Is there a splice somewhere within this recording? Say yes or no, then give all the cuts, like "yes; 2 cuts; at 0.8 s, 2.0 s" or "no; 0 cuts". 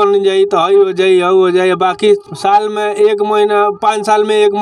no; 0 cuts